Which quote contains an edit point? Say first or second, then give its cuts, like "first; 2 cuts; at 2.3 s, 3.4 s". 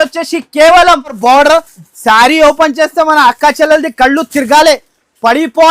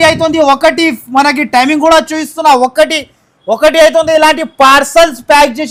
first; 1 cut; at 1.2 s